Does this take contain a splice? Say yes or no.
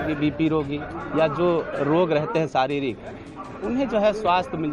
no